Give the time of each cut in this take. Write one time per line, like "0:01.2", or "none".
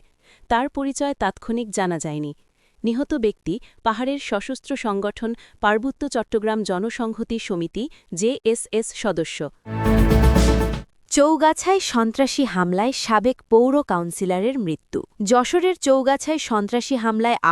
0:09.7
0:10.9
0:15.1